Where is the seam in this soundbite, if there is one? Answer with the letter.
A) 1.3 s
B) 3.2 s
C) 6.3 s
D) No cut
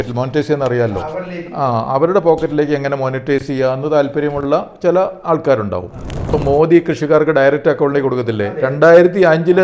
C